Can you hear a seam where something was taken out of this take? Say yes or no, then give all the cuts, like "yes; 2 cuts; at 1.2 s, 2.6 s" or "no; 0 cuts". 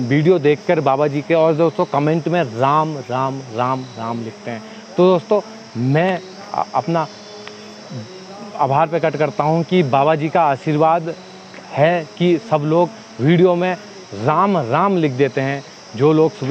no; 0 cuts